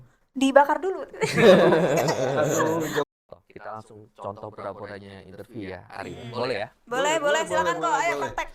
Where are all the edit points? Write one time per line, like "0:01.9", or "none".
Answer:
0:03.1